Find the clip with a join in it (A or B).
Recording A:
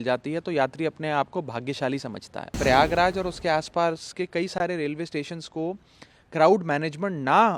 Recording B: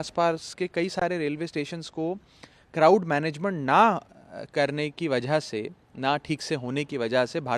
A